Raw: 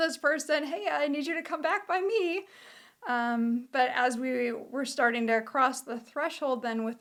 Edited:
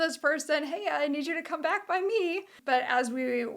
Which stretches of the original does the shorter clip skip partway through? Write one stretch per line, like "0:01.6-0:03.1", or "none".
0:02.6-0:03.7